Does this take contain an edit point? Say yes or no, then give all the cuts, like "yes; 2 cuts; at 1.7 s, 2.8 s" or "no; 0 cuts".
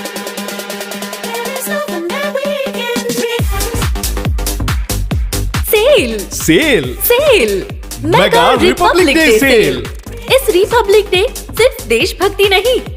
no; 0 cuts